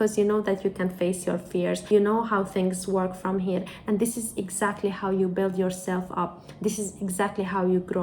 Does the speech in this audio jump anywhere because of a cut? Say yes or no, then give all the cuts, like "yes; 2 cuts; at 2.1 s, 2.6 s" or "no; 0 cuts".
yes; 1 cut; at 1.8 s